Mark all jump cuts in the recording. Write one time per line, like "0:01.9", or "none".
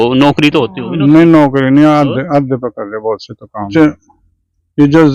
0:03.7